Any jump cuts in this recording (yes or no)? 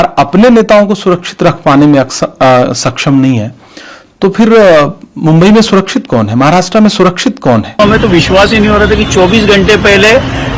yes